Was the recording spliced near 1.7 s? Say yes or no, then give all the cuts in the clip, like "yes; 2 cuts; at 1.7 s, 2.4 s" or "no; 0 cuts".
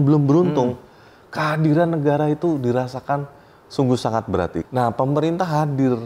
no; 1 cut; at 4.6 s